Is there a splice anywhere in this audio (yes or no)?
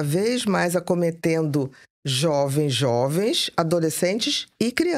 no